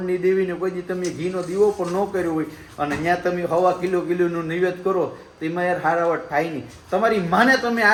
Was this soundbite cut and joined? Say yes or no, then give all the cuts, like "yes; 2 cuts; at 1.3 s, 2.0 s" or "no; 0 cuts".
no; 0 cuts